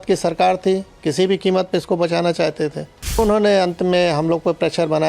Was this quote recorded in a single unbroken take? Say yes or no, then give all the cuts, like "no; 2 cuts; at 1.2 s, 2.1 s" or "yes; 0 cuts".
no; 1 cut; at 3.2 s